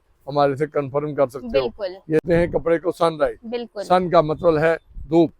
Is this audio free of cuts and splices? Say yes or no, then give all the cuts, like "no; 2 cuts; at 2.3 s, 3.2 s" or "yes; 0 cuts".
no; 1 cut; at 2.2 s